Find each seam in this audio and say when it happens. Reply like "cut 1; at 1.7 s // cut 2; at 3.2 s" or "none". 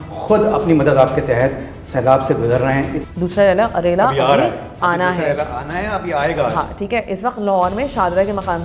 cut 1; at 3.0 s